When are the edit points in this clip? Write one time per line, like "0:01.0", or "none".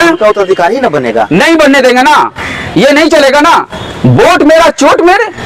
none